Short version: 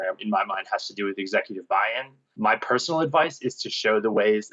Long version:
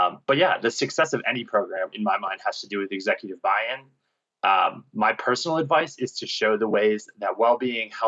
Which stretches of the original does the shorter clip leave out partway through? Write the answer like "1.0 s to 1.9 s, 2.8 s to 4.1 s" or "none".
4.0 s to 4.8 s